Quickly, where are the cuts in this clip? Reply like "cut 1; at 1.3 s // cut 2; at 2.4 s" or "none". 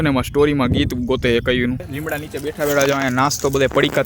cut 1; at 1.9 s